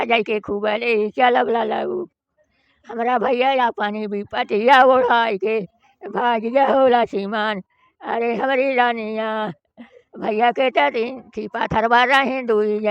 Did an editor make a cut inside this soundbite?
no; 0 cuts

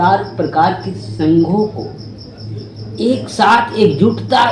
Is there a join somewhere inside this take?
no; 0 cuts

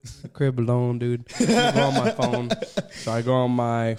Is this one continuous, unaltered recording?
yes; 0 cuts

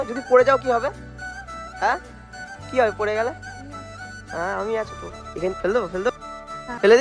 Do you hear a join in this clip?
no; 0 cuts

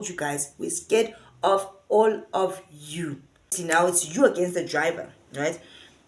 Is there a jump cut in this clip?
yes; 1 cut; at 3.6 s

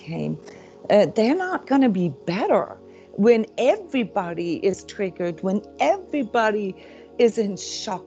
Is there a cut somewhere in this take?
no; 0 cuts

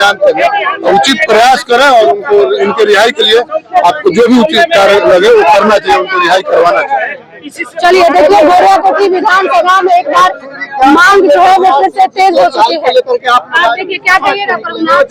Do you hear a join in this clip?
no; 0 cuts

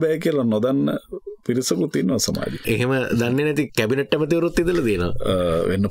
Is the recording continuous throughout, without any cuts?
no; 1 cut; at 2.6 s

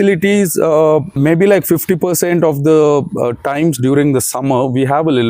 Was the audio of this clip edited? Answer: yes; 1 cut; at 1.1 s

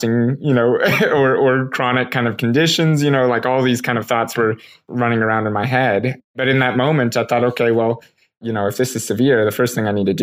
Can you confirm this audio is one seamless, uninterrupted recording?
no; 3 cuts; at 4.8 s, 6.4 s, 8.4 s

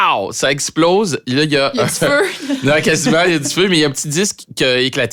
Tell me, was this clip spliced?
no; 0 cuts

